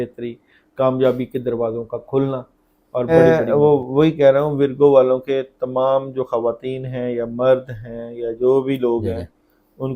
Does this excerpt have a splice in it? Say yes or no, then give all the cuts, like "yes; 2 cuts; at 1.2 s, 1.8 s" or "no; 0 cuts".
yes; 1 cut; at 3.1 s